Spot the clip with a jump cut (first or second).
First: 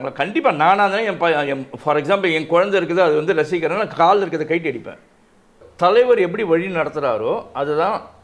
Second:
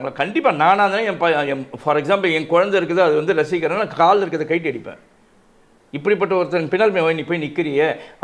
first